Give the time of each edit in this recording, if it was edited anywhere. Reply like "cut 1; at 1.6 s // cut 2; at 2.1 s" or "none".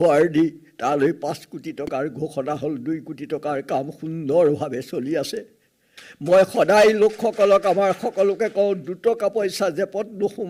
none